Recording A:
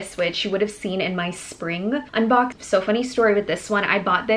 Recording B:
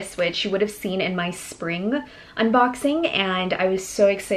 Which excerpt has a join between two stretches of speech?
A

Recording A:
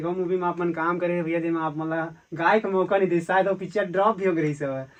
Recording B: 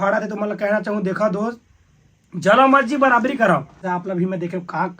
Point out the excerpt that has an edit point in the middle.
B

